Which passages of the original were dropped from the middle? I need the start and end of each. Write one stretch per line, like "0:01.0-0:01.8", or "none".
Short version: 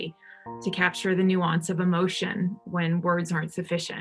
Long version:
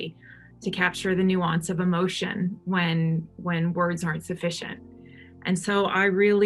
0:02.6-0:03.3